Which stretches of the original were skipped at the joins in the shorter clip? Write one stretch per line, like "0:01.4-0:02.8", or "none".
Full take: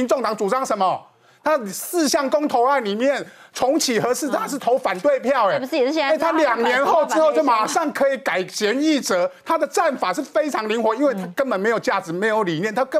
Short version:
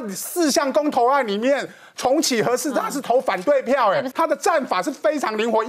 0:05.7-0:09.4